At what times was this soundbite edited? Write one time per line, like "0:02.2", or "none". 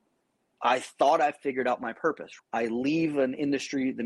0:02.3

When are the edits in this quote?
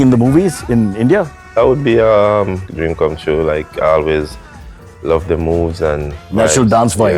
0:02.7
0:06.1

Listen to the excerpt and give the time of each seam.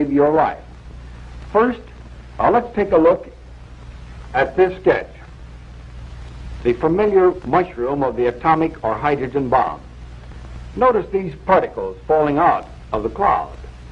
0:07.7

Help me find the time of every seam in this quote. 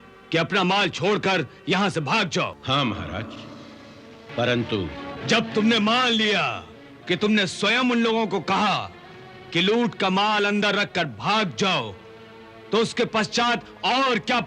0:02.6
0:04.3

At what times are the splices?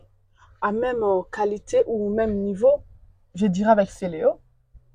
none

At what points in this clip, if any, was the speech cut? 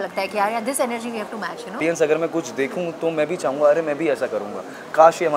0:01.8

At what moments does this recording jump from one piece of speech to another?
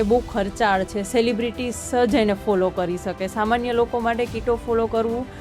none

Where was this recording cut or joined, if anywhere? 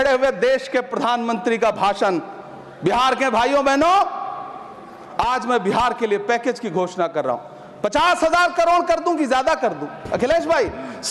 none

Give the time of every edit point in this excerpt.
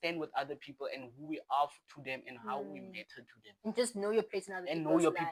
none

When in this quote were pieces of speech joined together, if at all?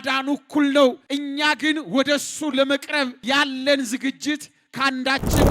0:01.0
0:03.2

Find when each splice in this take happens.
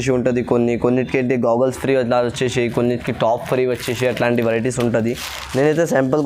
none

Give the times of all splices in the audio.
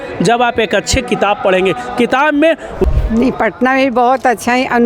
0:02.8

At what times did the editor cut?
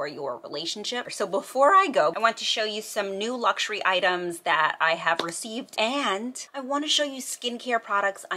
0:01.1
0:02.1
0:06.0

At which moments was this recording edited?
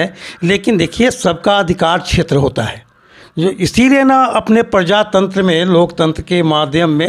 none

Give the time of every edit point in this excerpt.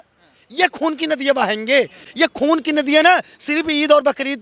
none

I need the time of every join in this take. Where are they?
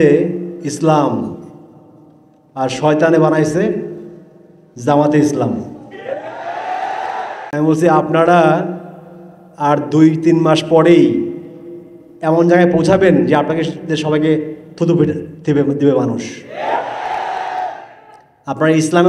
0:07.4

